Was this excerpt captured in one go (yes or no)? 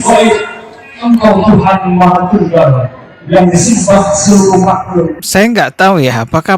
no